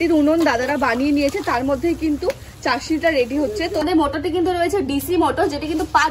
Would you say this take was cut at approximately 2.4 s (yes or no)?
no